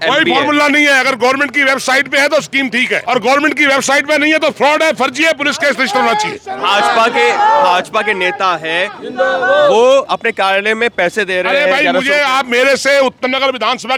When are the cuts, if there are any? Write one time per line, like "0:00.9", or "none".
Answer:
none